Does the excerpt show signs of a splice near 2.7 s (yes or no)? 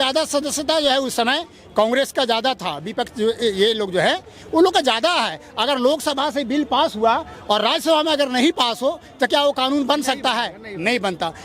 no